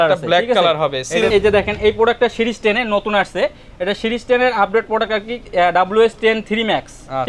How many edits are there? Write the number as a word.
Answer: one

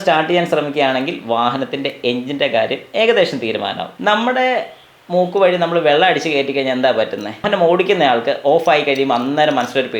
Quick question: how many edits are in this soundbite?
two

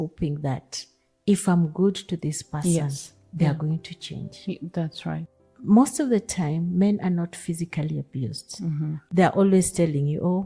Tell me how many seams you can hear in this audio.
two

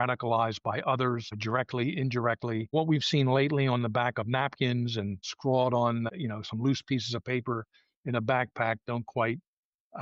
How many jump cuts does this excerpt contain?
four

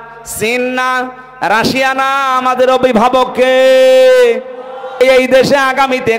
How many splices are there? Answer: one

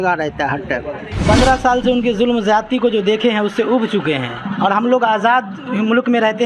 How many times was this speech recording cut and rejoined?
one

